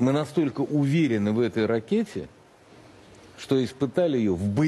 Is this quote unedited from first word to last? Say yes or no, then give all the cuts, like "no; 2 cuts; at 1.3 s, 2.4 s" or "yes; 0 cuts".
yes; 0 cuts